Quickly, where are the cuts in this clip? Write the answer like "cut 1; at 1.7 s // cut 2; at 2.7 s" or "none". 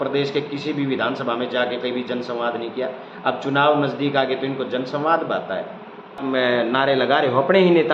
cut 1; at 6.2 s